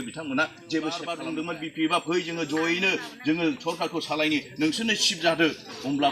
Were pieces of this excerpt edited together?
yes; 1 cut; at 1.2 s

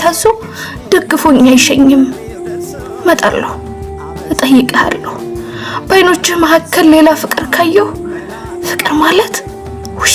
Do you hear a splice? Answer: yes; 1 cut; at 2.4 s

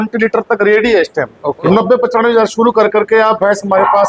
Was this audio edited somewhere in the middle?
yes; 1 cut; at 1.6 s

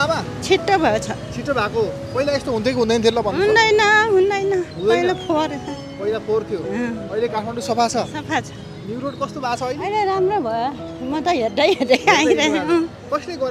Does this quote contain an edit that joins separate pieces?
no; 0 cuts

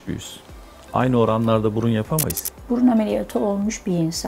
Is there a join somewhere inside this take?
yes; 1 cut; at 2.6 s

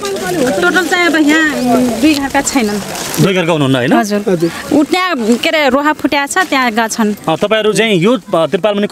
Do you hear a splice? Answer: no; 0 cuts

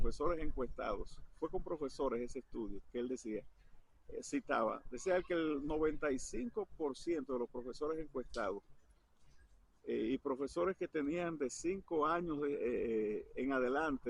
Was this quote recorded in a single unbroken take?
yes; 0 cuts

